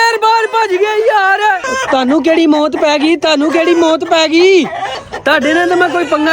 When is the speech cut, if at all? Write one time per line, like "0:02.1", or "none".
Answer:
0:01.7
0:05.0